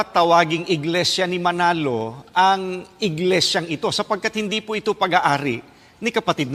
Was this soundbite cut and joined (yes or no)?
no